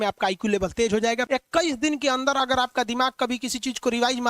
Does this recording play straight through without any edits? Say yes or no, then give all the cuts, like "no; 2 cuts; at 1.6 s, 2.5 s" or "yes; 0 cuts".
no; 1 cut; at 1.2 s